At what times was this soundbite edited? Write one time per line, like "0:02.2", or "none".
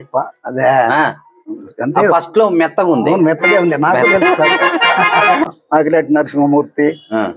0:05.5